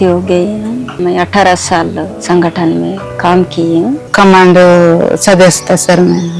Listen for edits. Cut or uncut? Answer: cut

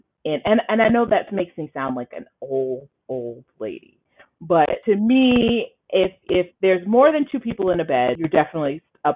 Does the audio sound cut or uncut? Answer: cut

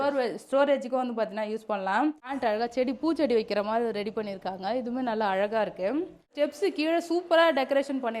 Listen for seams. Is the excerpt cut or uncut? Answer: cut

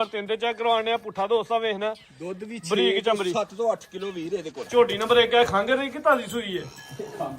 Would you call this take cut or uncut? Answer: cut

